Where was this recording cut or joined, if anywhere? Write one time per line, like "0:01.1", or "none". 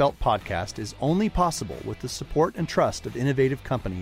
none